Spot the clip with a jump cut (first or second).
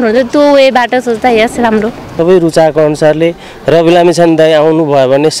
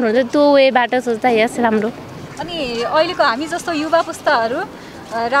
first